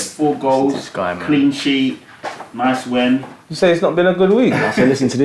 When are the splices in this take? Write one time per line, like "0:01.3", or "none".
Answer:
none